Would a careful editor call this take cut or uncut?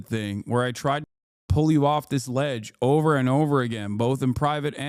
uncut